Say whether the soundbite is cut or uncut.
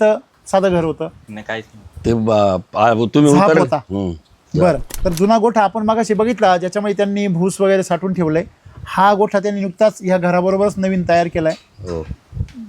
cut